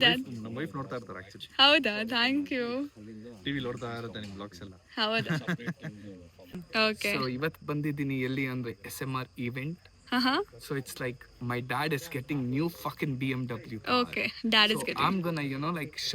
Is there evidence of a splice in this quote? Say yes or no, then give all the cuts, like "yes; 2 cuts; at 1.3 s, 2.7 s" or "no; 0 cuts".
yes; 1 cut; at 6.6 s